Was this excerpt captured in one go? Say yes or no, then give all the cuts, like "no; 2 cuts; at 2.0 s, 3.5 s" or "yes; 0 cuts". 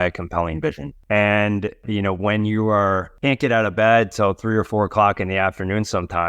no; 3 cuts; at 0.9 s, 1.8 s, 3.1 s